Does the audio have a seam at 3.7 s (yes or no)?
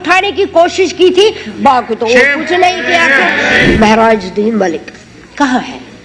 yes